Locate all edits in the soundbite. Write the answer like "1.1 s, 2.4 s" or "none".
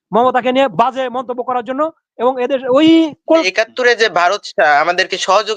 3.4 s